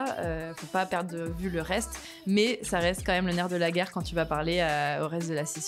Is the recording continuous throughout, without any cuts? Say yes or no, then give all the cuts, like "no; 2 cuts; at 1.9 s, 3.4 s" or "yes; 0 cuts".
yes; 0 cuts